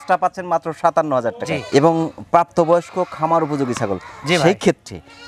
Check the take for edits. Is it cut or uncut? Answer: uncut